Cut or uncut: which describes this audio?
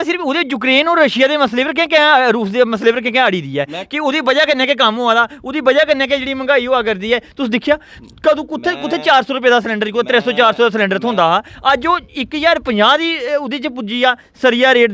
uncut